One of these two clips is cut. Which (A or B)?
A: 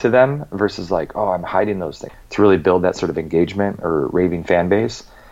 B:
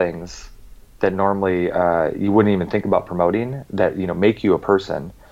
A